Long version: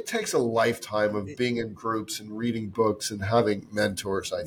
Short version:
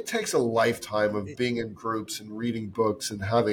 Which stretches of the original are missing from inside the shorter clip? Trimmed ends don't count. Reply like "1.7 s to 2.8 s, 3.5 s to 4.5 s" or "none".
none